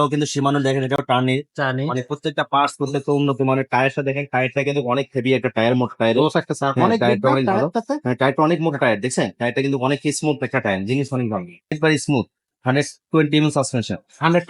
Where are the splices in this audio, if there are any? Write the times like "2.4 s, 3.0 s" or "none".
11.8 s